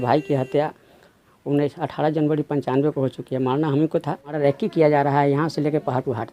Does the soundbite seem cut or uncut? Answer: cut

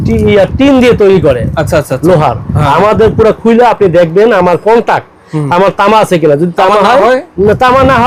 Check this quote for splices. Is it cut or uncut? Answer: uncut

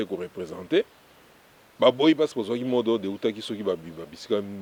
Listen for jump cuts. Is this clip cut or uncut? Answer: uncut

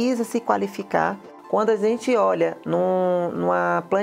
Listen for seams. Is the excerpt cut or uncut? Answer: cut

